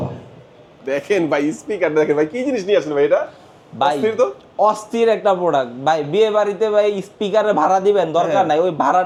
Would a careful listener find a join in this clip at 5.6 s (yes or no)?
no